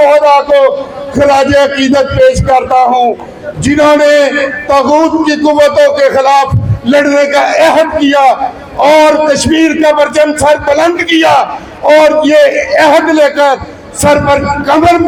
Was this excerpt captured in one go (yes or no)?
yes